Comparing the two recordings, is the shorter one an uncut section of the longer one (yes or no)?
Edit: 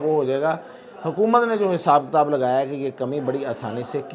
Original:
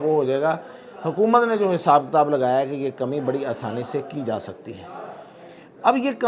yes